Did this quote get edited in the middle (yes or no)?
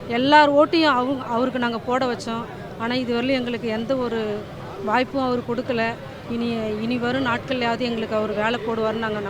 no